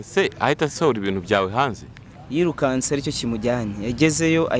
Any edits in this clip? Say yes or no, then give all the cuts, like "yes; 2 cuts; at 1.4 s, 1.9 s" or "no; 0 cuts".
no; 0 cuts